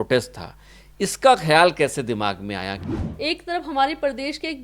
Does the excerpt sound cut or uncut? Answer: cut